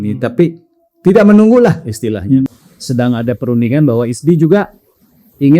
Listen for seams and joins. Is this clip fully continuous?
no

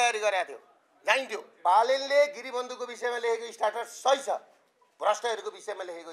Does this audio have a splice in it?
yes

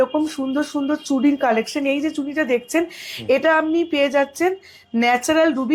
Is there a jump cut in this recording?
no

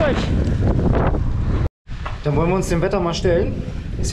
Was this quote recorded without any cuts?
no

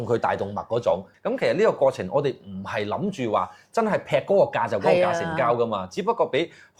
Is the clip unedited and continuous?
yes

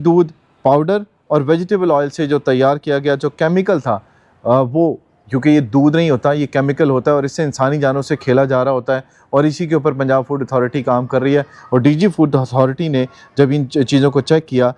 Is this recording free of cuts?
yes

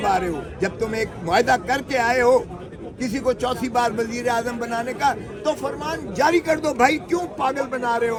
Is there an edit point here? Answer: no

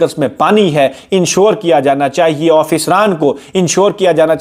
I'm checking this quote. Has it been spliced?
no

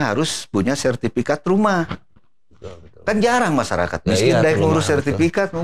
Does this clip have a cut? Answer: no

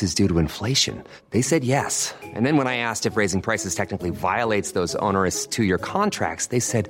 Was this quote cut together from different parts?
no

